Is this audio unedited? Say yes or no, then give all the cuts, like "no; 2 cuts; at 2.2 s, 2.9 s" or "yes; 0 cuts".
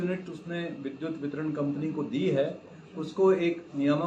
yes; 0 cuts